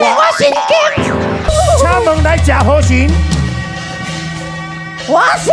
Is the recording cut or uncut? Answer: cut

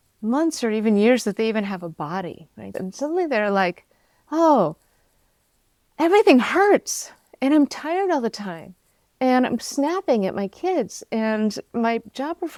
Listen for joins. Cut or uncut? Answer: uncut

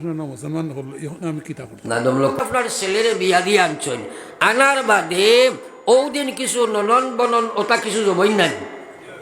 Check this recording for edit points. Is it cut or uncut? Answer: cut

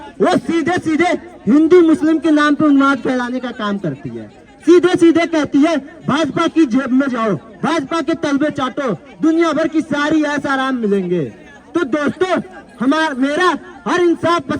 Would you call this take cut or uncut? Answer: uncut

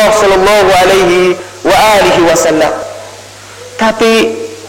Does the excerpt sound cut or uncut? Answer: cut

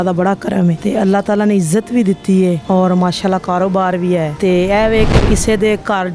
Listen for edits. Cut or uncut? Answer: cut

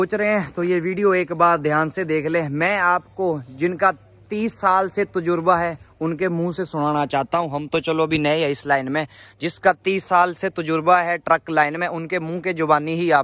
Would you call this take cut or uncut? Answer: uncut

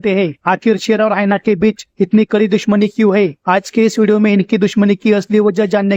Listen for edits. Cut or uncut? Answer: uncut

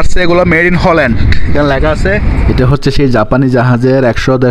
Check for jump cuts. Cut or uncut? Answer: cut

